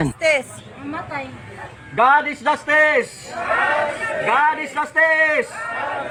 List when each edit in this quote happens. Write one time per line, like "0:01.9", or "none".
none